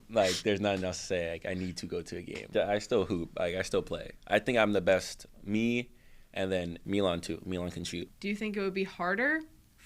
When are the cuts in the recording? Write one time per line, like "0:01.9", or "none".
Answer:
0:02.5
0:06.8
0:08.1